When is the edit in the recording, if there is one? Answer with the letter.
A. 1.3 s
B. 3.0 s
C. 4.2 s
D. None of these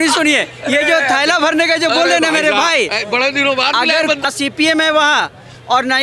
C